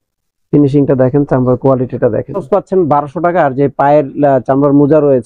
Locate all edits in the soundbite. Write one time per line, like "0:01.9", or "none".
0:02.4